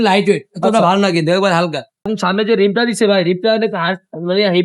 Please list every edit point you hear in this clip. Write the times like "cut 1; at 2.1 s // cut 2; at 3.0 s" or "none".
cut 1; at 2.1 s